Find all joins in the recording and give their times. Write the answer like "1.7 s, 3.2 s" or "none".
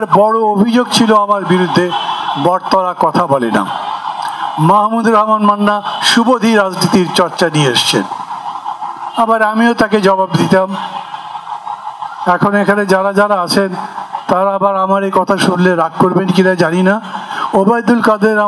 none